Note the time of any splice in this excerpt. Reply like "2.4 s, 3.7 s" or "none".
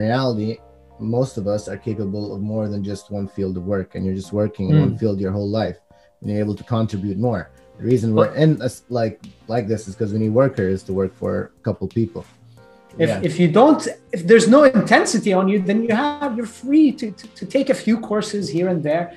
12.8 s